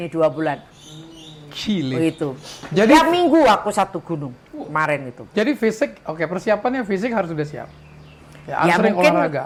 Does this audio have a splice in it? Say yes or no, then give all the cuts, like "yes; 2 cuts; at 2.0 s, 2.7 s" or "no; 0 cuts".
no; 0 cuts